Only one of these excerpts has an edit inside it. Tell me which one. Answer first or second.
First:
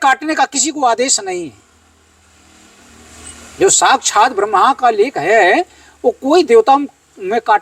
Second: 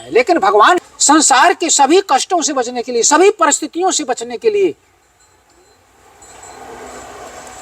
second